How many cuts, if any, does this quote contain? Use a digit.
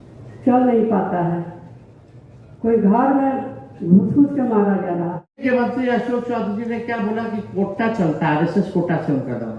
1